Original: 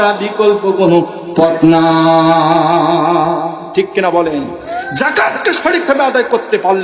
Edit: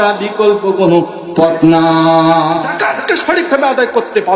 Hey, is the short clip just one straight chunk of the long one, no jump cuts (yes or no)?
no